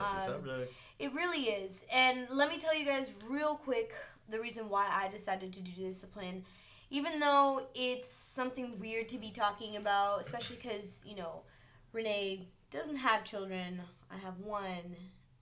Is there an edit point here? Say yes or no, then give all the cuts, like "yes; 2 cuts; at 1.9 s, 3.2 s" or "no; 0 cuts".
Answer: no; 0 cuts